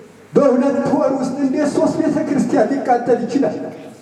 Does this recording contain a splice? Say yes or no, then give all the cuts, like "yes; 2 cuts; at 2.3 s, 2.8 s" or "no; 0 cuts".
no; 0 cuts